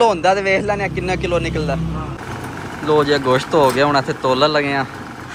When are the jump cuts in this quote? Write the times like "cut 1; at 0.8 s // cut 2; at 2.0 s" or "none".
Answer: cut 1; at 2.2 s